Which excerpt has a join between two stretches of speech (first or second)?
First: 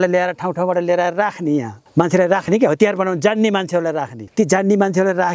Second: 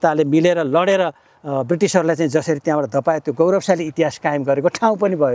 first